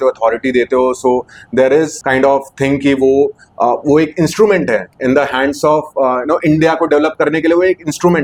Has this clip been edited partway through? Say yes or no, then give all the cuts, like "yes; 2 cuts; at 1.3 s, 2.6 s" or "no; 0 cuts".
no; 0 cuts